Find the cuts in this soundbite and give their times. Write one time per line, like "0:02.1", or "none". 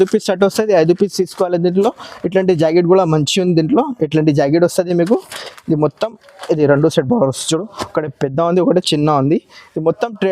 none